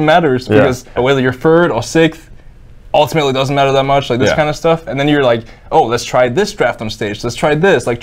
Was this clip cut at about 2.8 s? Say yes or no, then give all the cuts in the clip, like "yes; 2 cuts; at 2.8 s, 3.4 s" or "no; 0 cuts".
no; 1 cut; at 0.9 s